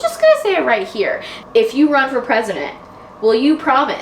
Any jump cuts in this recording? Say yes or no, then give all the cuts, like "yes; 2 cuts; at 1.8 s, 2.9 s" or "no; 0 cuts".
yes; 1 cut; at 1.3 s